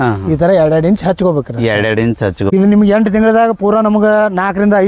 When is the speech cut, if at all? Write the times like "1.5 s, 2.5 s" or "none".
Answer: 2.5 s